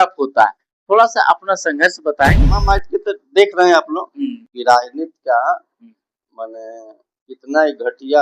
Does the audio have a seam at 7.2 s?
no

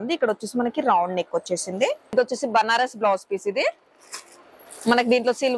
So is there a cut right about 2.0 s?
yes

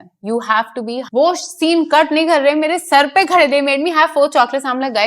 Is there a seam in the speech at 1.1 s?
yes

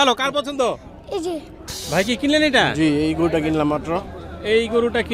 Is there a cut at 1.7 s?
yes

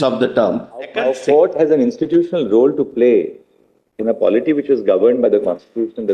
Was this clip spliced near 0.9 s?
yes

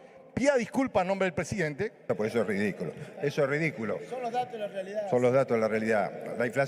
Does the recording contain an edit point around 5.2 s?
no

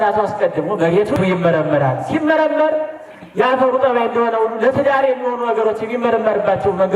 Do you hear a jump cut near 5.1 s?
no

